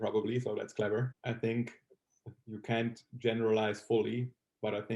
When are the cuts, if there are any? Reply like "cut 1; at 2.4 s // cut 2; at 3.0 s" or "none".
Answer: cut 1; at 1.2 s

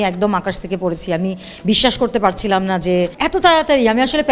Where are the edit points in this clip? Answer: cut 1; at 3.1 s

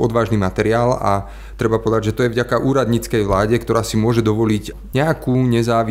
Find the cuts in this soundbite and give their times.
cut 1; at 4.7 s

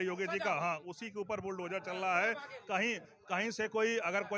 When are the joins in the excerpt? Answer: none

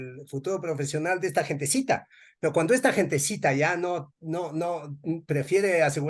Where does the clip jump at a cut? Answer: none

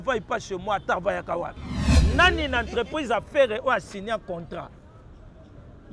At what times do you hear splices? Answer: cut 1; at 1.9 s

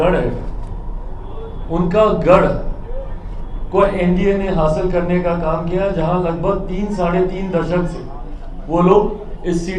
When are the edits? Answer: none

